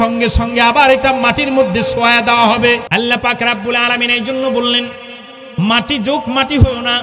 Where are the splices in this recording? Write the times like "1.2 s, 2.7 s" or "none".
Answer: 2.8 s